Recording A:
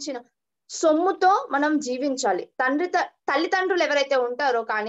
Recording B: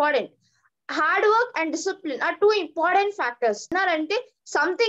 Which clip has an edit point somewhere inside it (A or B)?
B